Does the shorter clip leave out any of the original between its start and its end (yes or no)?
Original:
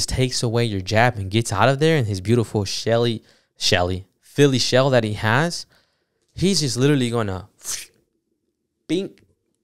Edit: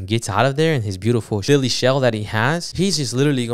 yes